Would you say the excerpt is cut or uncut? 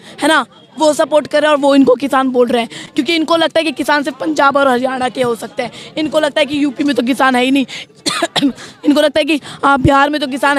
uncut